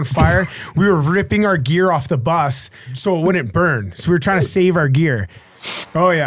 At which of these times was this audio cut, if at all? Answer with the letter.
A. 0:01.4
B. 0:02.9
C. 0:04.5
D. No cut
B